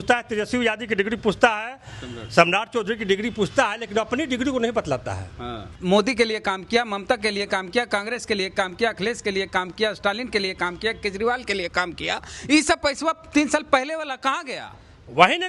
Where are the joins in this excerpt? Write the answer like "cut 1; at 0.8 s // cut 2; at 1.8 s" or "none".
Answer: cut 1; at 5.7 s